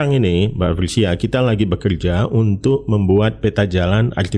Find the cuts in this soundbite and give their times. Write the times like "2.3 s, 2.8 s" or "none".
none